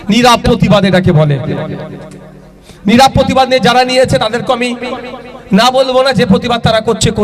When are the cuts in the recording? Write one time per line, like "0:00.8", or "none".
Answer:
none